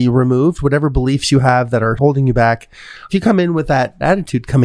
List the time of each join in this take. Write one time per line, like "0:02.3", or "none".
0:02.0